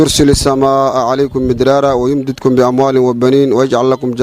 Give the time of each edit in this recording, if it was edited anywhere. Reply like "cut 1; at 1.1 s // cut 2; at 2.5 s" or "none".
none